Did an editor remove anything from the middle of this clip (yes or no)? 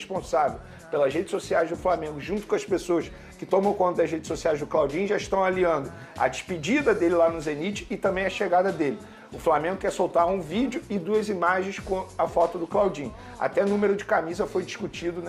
no